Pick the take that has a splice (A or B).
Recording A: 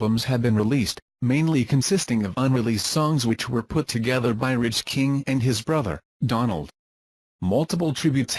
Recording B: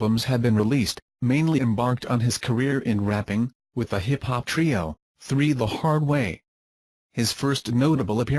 A